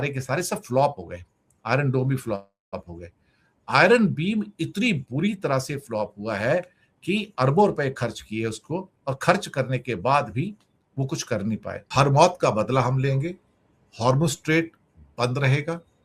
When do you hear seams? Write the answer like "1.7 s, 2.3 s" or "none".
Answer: 11.8 s